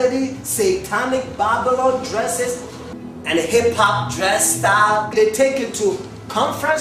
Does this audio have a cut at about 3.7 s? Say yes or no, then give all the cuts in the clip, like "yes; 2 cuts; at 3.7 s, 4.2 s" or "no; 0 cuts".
yes; 1 cut; at 3.7 s